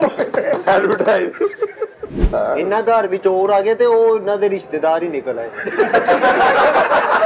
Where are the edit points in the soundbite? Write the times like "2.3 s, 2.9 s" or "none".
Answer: 2.2 s